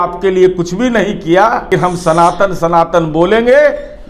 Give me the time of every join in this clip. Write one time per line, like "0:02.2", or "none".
0:01.7